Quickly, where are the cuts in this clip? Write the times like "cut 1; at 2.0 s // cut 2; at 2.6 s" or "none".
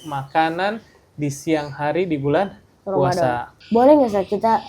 cut 1; at 3.5 s

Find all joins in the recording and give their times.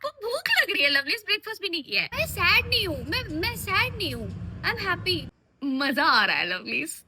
cut 1; at 2.1 s // cut 2; at 5.3 s

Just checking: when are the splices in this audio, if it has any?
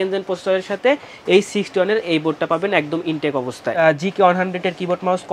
cut 1; at 3.6 s

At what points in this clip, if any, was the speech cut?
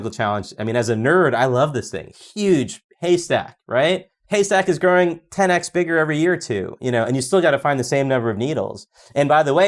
cut 1; at 4.1 s

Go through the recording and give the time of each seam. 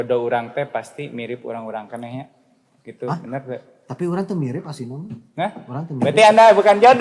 none

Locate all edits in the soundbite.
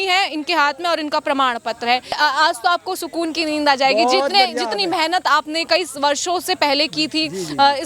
cut 1; at 2.1 s

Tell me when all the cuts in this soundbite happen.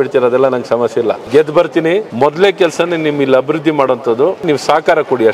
cut 1; at 1.2 s // cut 2; at 2.1 s // cut 3; at 4.4 s

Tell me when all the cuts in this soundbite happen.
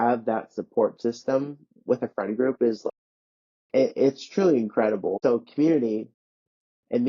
cut 1; at 2.9 s // cut 2; at 5.1 s

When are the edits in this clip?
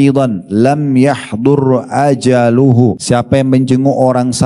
cut 1; at 3.0 s

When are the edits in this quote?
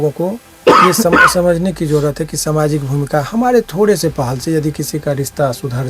none

